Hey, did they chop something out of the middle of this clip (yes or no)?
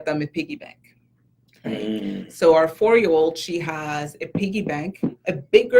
no